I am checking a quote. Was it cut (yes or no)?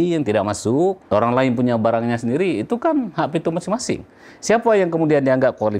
yes